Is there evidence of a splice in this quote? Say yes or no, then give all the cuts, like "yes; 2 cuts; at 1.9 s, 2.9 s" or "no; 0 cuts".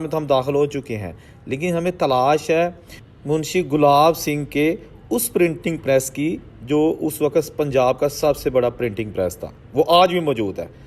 no; 0 cuts